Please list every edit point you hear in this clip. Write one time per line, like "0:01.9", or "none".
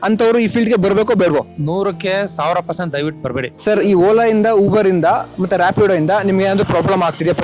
0:01.5
0:03.5